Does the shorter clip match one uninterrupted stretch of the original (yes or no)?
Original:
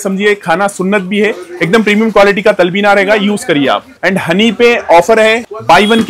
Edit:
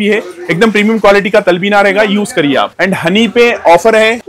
no